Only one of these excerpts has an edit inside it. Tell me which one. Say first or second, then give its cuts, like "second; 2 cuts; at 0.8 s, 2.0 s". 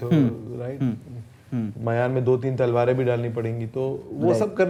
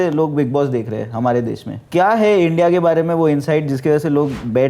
second; 1 cut; at 1.7 s